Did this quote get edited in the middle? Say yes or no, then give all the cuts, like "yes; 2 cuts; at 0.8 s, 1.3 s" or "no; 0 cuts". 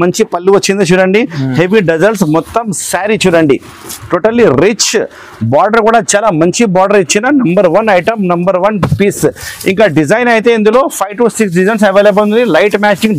no; 0 cuts